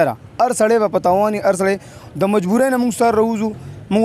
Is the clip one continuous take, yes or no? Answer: yes